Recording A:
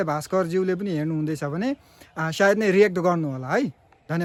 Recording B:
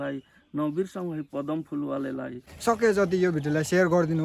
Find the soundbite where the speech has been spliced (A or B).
B